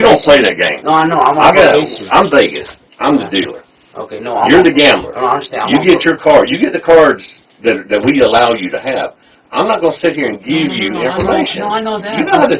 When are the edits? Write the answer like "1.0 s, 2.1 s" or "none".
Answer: none